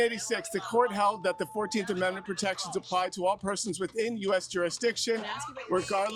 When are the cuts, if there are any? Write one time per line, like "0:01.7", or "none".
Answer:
none